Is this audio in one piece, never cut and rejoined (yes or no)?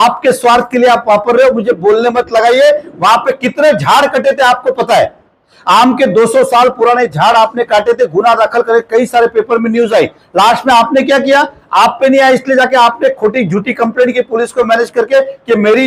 yes